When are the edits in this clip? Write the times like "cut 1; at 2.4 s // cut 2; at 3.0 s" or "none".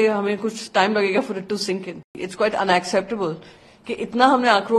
cut 1; at 2.2 s